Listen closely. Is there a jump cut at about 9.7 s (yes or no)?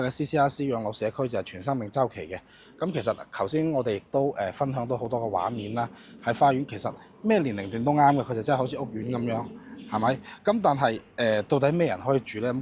no